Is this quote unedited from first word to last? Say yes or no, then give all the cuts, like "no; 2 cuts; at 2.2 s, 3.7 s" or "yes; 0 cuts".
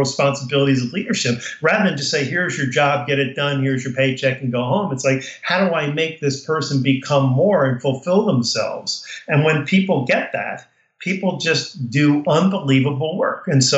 yes; 0 cuts